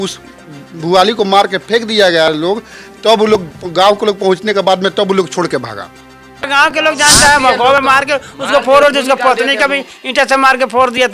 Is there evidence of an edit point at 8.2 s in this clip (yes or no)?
no